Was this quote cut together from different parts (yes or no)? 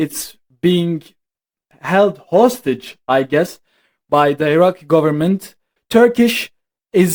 yes